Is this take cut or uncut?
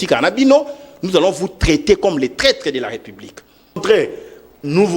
cut